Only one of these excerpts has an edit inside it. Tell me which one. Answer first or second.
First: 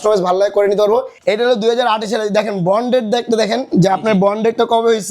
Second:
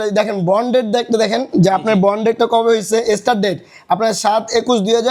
first